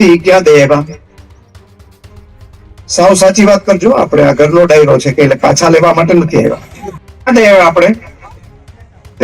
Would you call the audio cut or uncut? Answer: uncut